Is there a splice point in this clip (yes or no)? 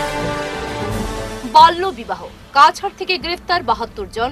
no